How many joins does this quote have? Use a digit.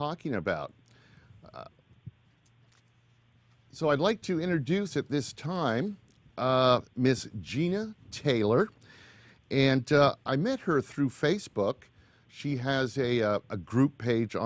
1